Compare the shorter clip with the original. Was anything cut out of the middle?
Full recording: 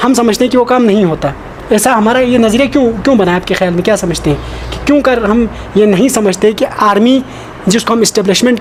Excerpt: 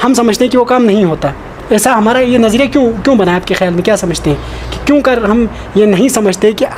no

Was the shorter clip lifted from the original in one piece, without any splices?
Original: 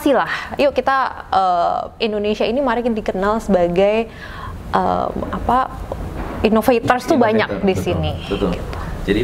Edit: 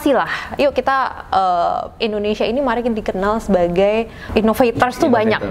no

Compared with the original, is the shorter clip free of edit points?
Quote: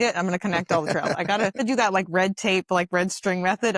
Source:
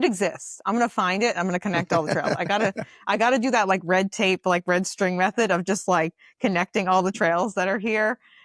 no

